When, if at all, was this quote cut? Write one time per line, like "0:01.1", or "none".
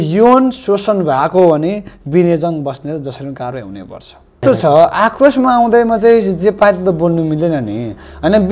0:04.4